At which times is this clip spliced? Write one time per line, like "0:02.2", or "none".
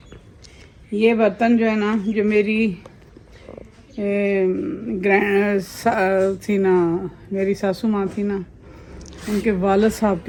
none